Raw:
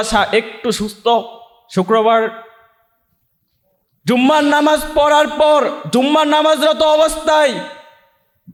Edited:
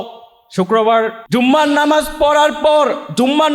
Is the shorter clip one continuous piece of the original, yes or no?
no